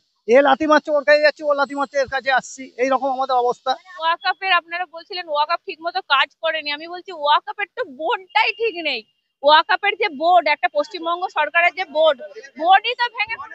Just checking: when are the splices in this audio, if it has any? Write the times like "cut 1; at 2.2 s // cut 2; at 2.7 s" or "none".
cut 1; at 4.0 s